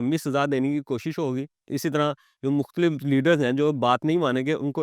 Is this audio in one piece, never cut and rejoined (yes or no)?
yes